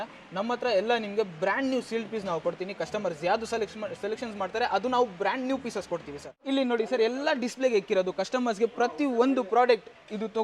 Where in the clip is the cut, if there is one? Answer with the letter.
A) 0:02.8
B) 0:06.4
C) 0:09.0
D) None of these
B